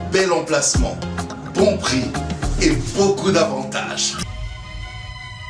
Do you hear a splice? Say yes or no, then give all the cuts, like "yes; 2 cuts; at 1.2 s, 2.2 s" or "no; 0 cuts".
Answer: yes; 1 cut; at 4.3 s